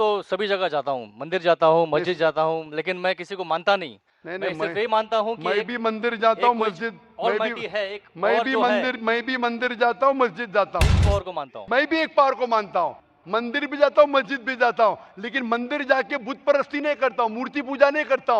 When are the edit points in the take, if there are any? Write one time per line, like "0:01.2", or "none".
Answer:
0:10.9

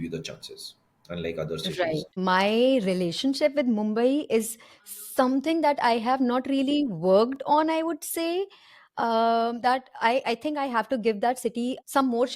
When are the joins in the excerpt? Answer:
0:02.0

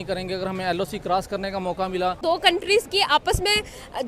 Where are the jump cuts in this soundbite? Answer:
0:02.2

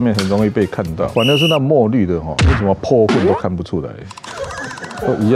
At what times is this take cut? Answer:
0:01.1

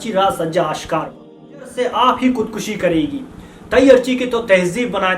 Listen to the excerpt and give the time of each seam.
0:01.8

